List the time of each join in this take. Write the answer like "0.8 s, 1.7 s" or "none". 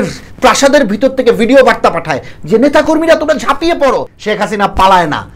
4.1 s